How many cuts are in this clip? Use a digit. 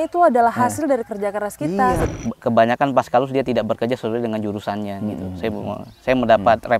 1